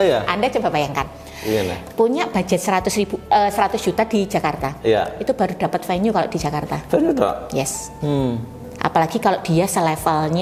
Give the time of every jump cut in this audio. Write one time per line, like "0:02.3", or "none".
none